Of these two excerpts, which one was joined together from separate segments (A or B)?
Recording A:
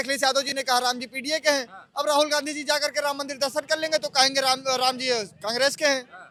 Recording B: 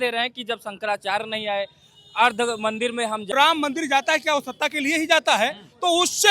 B